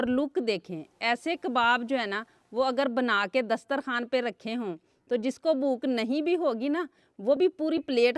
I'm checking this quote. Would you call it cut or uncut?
uncut